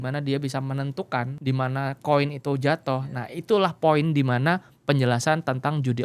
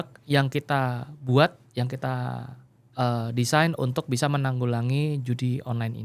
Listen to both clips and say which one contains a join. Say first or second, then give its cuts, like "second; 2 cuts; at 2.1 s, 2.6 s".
first; 1 cut; at 1.3 s